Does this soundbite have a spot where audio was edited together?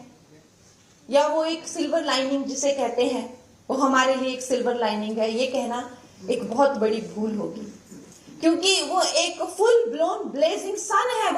no; 0 cuts

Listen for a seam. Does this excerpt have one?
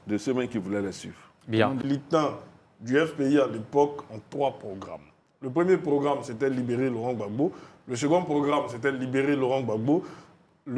yes; 1 cut; at 1.8 s

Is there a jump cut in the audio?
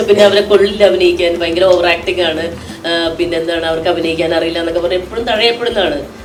no; 0 cuts

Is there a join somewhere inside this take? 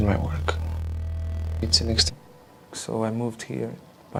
no; 0 cuts

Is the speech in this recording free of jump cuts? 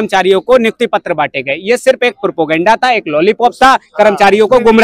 yes; 0 cuts

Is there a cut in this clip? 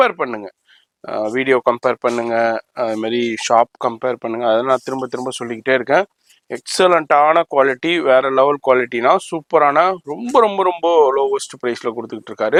no; 0 cuts

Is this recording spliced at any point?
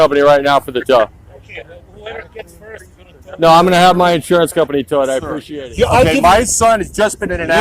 yes; 1 cut; at 5.4 s

